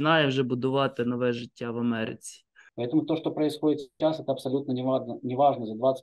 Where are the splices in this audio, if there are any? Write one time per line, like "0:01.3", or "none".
0:02.6